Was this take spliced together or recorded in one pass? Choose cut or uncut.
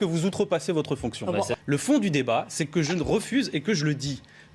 uncut